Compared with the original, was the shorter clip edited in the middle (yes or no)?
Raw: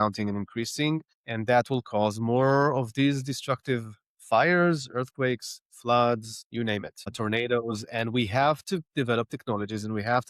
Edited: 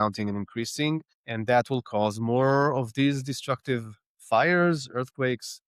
no